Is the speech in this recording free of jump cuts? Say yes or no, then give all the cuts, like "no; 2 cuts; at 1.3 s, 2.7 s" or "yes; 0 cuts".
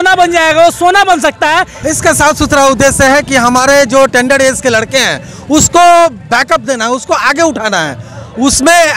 no; 1 cut; at 1.7 s